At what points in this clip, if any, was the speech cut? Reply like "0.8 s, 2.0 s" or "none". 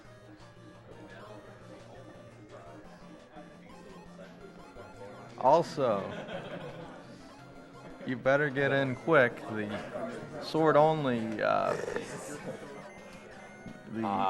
11.4 s